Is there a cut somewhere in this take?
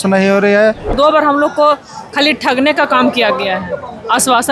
yes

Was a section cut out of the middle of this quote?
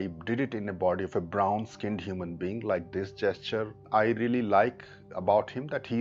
yes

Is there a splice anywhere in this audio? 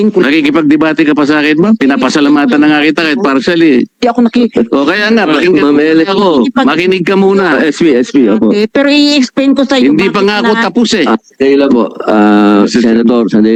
no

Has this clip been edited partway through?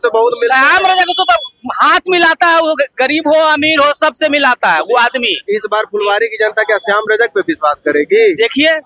no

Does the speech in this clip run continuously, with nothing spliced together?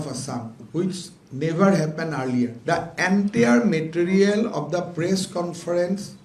no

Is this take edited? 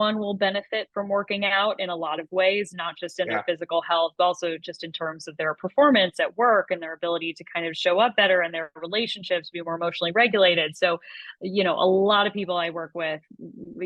no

